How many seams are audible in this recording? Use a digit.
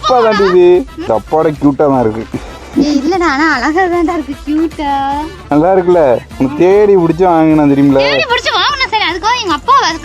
1